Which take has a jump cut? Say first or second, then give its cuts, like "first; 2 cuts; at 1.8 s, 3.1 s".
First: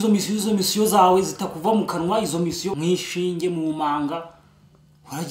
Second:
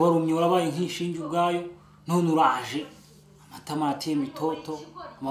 first; 1 cut; at 2.7 s